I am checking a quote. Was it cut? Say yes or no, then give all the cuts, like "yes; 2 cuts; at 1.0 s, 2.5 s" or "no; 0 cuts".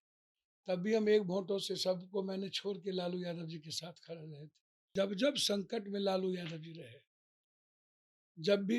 yes; 1 cut; at 4.9 s